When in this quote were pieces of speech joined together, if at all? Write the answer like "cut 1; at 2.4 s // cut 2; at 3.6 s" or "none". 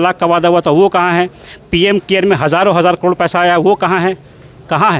none